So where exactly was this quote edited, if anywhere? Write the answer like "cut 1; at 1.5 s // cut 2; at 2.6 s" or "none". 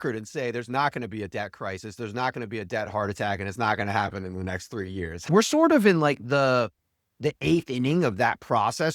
cut 1; at 5.3 s